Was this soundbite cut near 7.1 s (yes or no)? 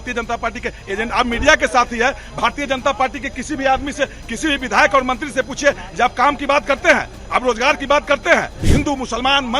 no